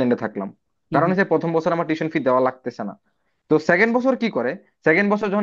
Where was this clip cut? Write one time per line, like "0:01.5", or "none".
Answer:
none